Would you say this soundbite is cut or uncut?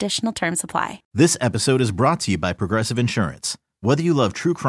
cut